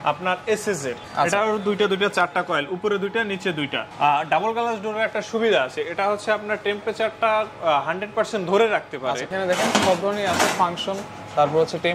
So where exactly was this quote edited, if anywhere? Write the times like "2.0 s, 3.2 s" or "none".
1.1 s, 3.9 s, 9.3 s